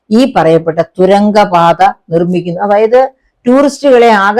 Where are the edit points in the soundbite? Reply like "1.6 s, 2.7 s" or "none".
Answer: none